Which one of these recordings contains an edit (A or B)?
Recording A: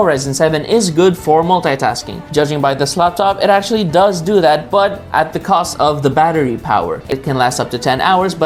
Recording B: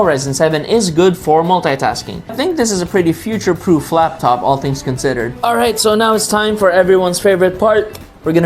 B